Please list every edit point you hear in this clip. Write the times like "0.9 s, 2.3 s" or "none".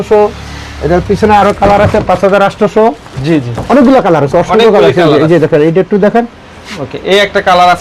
none

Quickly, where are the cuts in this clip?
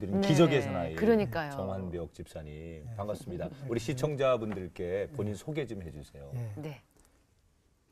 2.2 s

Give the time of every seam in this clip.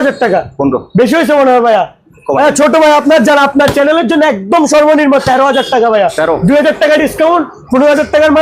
none

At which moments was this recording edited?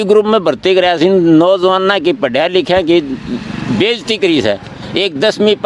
none

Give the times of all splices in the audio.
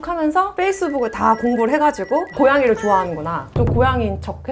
3.5 s

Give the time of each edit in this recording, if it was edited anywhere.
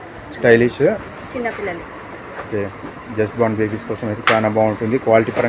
1.1 s

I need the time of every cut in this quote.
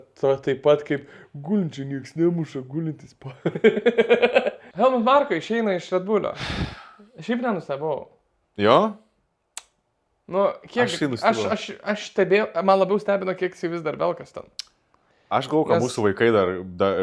4.6 s

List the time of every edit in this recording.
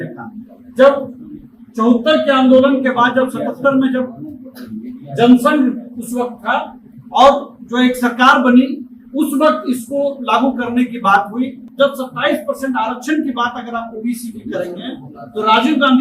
11.6 s

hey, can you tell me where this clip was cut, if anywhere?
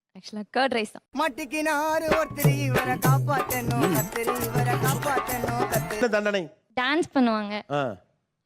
6.0 s

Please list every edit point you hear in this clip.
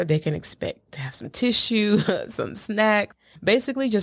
none

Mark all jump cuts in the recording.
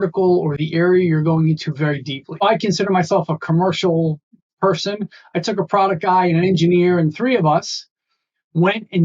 2.4 s

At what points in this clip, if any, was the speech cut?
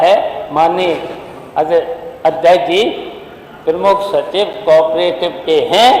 none

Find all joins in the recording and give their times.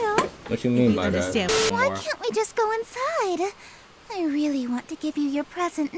1.6 s

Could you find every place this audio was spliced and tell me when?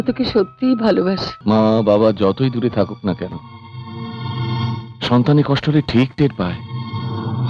1.3 s

